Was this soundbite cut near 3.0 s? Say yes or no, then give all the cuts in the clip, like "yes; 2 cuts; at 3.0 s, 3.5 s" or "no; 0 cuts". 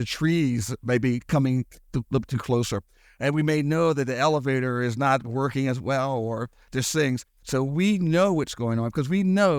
no; 1 cut; at 7.3 s